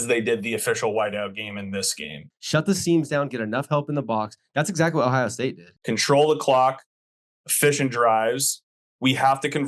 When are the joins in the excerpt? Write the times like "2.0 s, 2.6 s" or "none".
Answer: 2.2 s, 5.7 s